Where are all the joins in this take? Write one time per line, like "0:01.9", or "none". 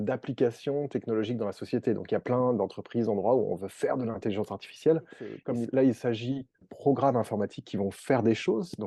0:05.3
0:06.7